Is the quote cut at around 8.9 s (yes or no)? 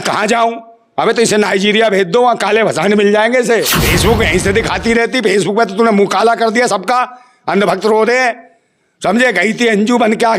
no